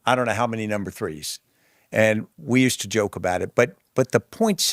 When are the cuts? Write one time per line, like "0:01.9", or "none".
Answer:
none